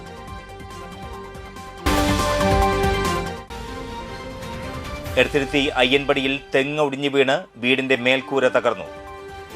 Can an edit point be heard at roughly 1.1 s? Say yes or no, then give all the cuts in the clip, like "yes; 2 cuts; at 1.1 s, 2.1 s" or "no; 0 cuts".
yes; 1 cut; at 1.1 s